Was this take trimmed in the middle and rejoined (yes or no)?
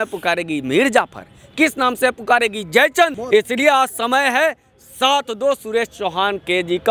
yes